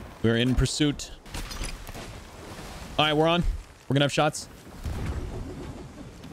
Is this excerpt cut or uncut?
cut